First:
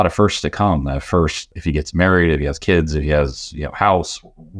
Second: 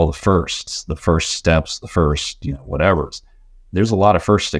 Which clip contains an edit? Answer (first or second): first